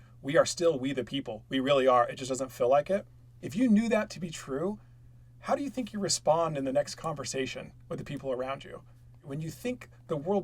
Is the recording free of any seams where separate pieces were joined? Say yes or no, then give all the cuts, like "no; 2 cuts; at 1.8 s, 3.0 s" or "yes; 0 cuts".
no; 2 cuts; at 3.4 s, 9.2 s